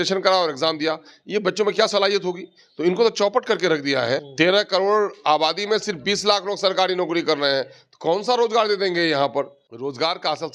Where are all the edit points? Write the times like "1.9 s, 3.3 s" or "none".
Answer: 4.3 s, 9.6 s